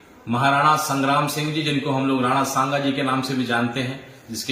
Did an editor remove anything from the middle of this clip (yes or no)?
no